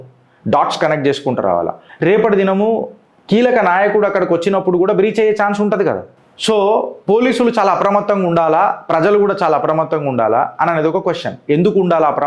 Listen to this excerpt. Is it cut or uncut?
cut